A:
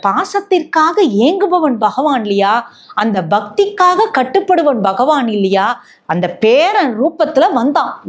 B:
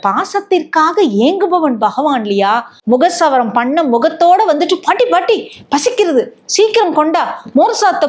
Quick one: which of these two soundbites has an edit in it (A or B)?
B